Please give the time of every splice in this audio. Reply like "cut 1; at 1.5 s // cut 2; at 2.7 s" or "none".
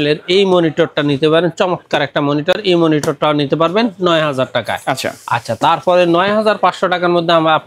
none